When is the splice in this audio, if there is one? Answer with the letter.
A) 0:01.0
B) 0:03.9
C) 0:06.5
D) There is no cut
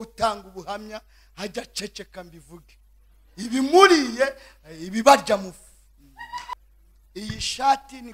C